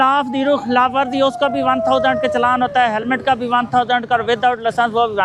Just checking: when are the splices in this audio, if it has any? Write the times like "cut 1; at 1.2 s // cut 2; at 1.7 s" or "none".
none